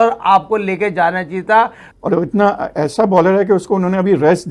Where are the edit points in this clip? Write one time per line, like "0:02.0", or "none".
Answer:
0:01.9